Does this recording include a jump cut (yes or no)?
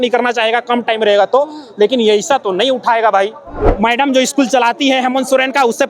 yes